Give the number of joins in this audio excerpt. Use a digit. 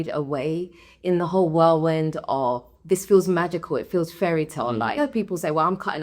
1